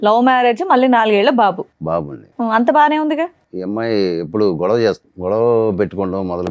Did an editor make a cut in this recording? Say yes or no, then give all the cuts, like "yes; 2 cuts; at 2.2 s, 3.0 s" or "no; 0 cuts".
yes; 2 cuts; at 3.5 s, 5.1 s